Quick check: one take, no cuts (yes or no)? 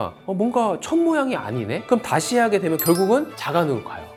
yes